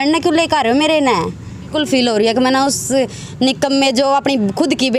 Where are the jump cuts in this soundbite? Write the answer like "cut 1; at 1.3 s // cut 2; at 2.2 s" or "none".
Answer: cut 1; at 1.7 s